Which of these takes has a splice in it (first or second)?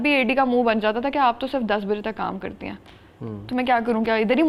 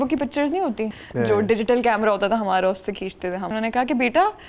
second